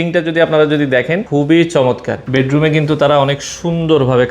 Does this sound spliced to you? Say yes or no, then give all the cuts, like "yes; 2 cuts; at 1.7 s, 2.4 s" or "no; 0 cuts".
yes; 2 cuts; at 1.2 s, 2.1 s